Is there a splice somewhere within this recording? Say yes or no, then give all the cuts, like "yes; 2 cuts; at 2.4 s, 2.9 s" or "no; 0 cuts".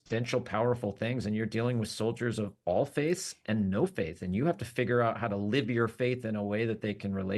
no; 0 cuts